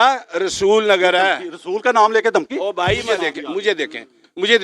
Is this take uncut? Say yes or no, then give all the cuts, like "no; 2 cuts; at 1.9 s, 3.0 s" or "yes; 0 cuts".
no; 1 cut; at 3.0 s